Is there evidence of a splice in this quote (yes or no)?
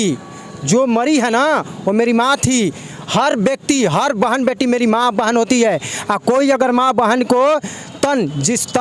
no